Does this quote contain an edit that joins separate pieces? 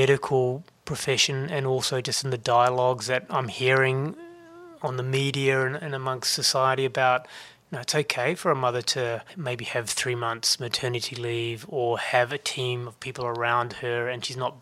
yes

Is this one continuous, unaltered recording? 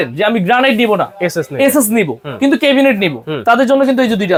yes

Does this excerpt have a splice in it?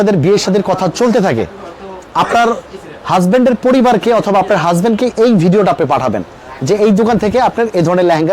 no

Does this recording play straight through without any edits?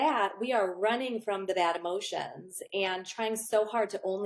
yes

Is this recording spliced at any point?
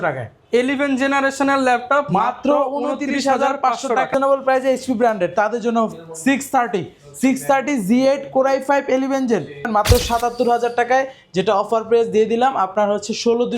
yes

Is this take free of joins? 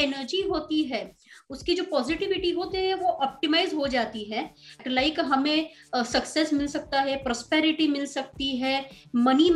yes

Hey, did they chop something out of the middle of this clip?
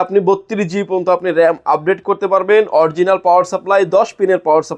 no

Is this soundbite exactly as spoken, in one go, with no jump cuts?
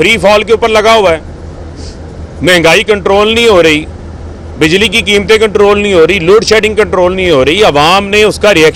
yes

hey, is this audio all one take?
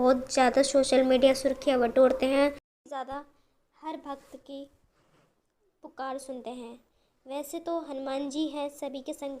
no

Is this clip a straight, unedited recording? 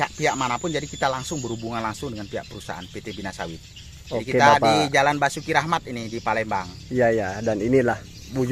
yes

